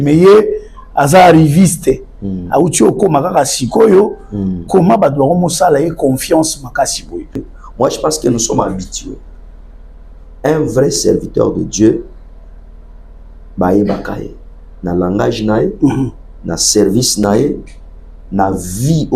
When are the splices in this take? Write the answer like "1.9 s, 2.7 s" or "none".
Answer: 7.6 s